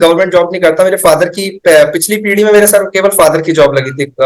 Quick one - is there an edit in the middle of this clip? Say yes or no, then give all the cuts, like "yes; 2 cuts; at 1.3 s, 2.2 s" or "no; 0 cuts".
no; 0 cuts